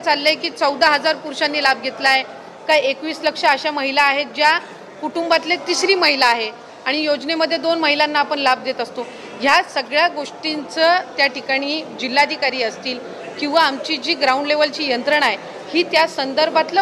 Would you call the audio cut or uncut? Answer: uncut